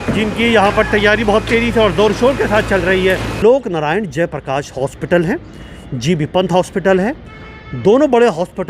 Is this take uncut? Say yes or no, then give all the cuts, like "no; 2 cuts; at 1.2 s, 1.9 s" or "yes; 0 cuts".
no; 1 cut; at 3.3 s